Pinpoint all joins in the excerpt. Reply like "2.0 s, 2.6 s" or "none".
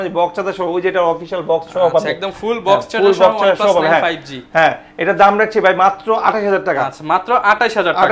none